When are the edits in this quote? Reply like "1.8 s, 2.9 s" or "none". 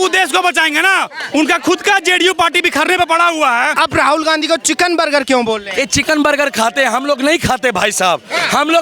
3.7 s